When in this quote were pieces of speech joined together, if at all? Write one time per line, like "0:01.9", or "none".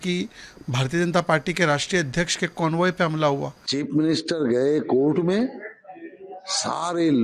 0:03.6